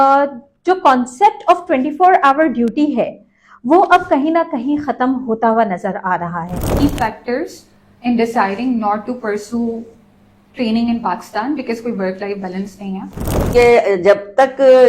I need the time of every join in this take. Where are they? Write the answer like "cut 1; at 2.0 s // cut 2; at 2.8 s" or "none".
cut 1; at 6.8 s // cut 2; at 13.5 s